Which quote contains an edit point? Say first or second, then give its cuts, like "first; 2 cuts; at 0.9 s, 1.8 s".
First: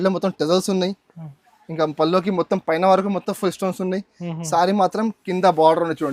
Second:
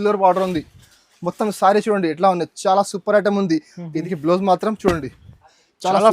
second; 1 cut; at 3.9 s